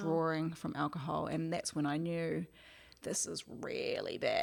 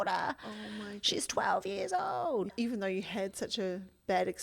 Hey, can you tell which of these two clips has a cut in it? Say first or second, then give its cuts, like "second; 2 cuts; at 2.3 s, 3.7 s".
second; 1 cut; at 2.5 s